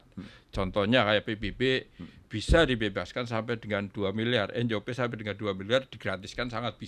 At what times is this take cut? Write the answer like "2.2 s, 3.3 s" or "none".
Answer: none

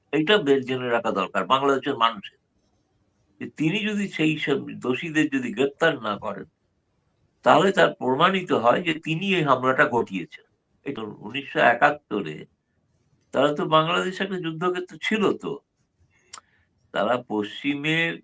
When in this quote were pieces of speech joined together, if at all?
10.9 s

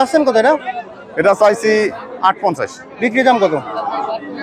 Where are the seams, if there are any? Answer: none

